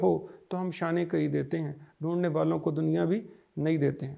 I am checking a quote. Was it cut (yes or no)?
no